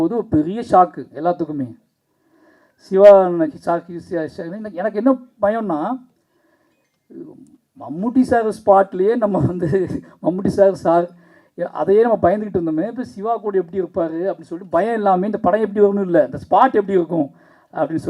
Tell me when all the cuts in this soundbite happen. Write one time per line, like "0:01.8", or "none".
none